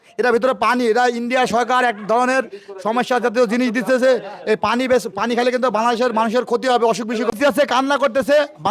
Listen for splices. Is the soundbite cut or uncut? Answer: cut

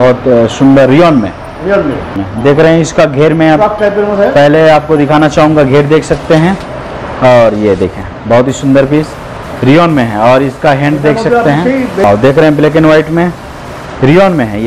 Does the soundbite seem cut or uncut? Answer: cut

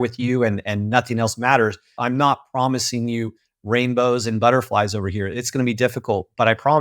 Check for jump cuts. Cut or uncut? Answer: cut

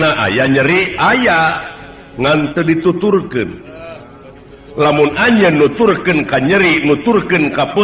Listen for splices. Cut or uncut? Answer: uncut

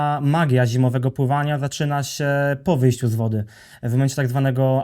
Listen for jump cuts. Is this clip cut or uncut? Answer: uncut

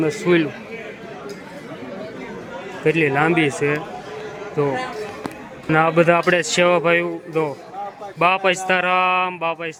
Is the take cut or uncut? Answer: uncut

